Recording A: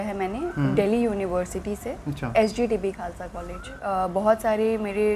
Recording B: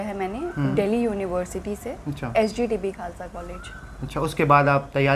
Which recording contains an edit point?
A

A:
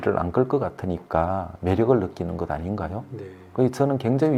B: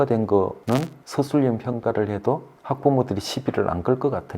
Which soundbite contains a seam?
B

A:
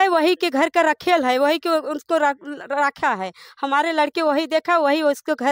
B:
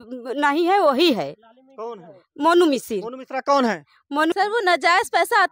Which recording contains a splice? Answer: B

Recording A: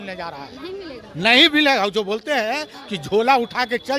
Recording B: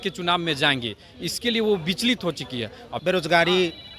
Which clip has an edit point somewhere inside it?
B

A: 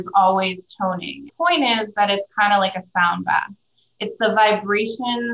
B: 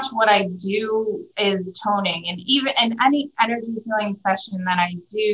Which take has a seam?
A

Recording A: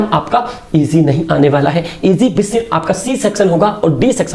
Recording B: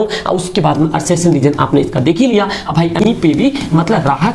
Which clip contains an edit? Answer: B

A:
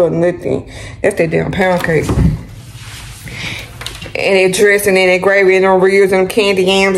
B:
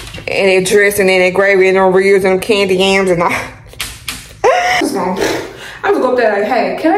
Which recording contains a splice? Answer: B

